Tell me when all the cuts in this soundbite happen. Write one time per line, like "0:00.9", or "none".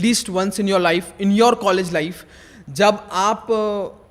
none